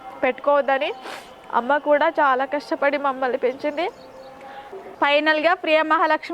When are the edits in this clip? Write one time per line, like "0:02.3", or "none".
0:04.8